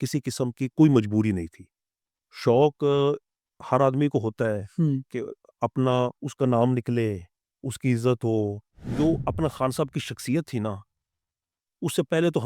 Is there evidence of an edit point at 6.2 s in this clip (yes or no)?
yes